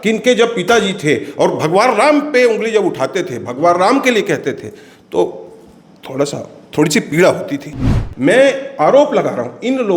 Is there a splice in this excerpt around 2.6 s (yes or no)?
no